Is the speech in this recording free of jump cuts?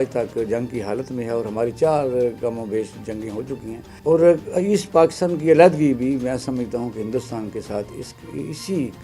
no; 1 cut; at 3.8 s

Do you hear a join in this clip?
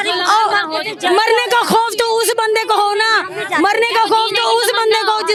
no; 0 cuts

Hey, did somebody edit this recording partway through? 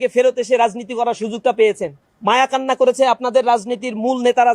no; 0 cuts

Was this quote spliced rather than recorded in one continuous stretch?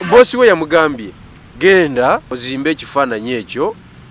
yes; 1 cut; at 2.4 s

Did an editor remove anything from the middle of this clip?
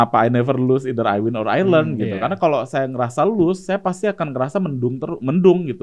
no; 0 cuts

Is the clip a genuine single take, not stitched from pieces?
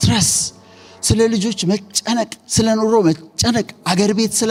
yes; 0 cuts

